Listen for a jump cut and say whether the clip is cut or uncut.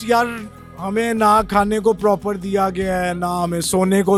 uncut